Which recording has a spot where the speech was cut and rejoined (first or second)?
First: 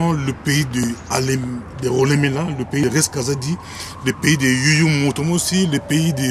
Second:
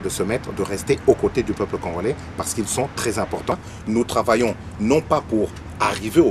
second